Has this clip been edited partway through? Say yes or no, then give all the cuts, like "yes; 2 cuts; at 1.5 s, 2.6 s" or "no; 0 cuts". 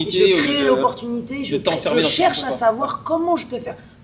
no; 0 cuts